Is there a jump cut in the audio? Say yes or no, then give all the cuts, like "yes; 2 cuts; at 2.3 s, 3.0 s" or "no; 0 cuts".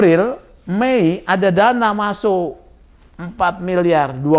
no; 0 cuts